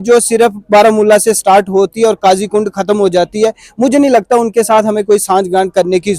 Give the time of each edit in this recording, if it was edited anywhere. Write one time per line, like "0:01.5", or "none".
none